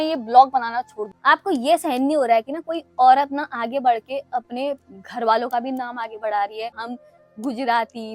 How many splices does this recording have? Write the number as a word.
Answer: two